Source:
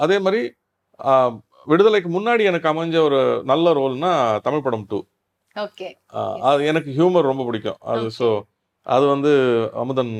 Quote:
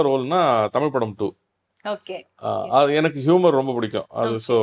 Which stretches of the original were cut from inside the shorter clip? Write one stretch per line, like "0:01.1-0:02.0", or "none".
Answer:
none

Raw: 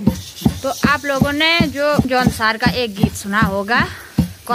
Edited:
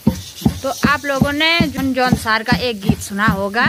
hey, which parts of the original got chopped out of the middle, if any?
0:01.9-0:02.0

